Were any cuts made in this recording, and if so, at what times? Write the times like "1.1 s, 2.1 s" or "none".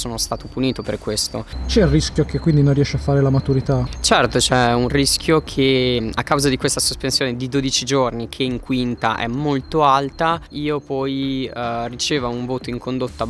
1.5 s, 6.0 s